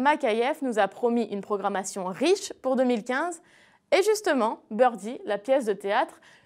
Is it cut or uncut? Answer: uncut